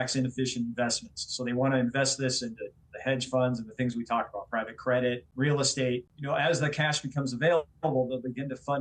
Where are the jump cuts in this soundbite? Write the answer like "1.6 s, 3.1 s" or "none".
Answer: 5.3 s, 6.1 s